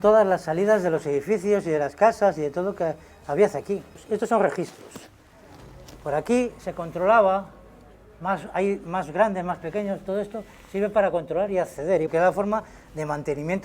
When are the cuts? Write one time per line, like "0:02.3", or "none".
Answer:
none